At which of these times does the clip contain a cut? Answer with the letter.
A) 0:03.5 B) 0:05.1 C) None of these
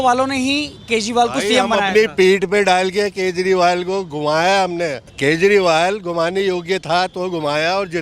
B